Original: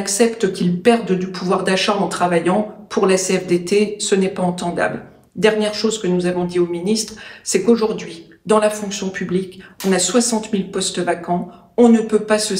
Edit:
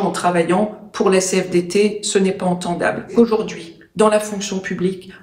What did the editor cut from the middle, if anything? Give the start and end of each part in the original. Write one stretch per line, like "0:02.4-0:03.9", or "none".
0:05.1-0:07.6

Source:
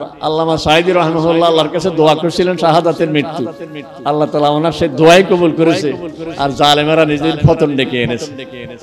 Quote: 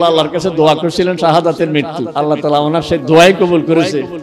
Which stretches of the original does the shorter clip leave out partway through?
0:03.4-0:03.9

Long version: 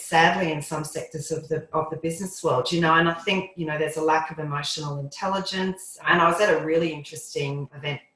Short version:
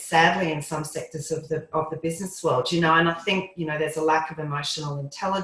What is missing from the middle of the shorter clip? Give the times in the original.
none

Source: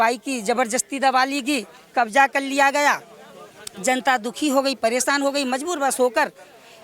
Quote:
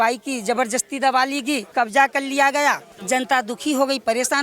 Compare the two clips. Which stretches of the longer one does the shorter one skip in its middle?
0:01.7-0:01.9
0:03.1-0:03.7

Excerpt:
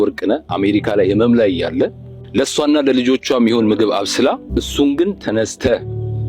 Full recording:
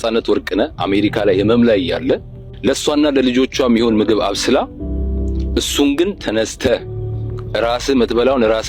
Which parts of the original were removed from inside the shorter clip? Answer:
0:04.7-0:05.4

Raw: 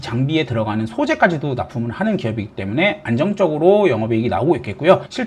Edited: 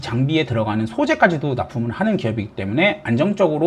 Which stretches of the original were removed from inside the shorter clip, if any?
none

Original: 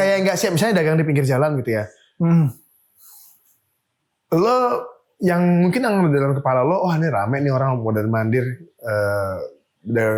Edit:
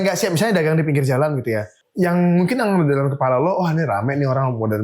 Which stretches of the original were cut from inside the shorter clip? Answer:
0:02.0-0:05.0

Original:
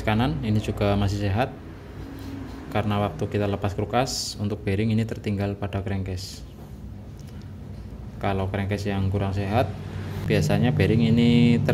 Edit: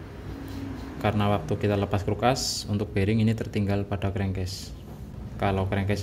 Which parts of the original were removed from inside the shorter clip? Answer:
0:06.8-0:07.9

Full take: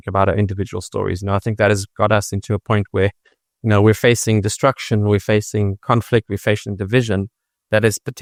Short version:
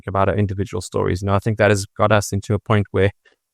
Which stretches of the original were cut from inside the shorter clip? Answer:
none

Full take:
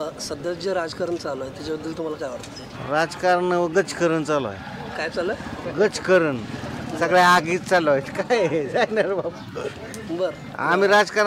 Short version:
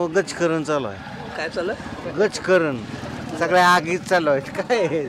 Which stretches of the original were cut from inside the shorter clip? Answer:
none

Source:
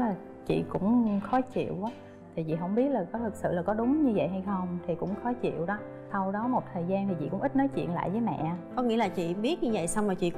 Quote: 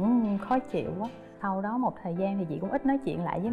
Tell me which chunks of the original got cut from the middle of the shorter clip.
0:02.1-0:06.0

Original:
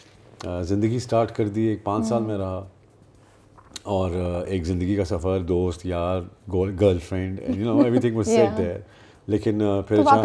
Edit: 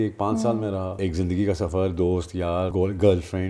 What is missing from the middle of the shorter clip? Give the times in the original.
0:02.6-0:04.5
0:06.2-0:06.5

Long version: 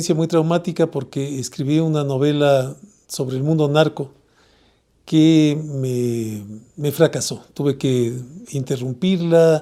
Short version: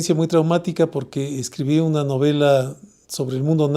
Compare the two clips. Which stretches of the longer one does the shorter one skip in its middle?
none

